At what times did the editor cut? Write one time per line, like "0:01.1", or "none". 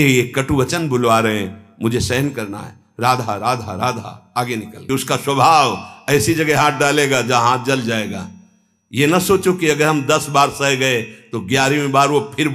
0:04.8